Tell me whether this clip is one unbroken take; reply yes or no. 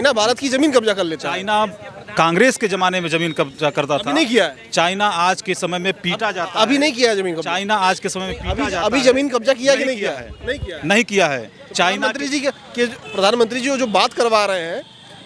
yes